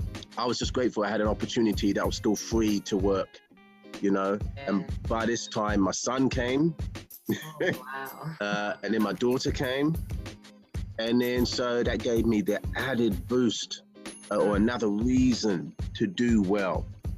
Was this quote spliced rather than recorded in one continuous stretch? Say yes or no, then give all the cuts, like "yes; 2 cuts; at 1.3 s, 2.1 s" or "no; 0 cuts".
no; 0 cuts